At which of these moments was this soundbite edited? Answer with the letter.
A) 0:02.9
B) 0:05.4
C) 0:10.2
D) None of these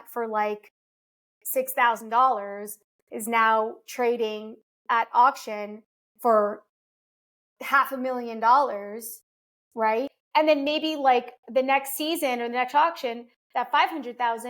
C